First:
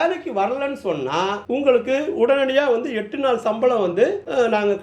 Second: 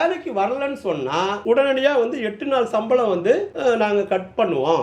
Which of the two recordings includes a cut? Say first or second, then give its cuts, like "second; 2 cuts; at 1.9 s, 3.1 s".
second; 1 cut; at 1.4 s